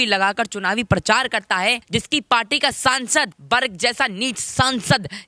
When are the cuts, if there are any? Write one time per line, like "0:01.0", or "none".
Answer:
0:01.8
0:03.4